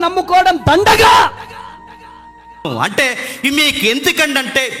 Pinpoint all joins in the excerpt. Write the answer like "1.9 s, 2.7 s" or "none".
2.7 s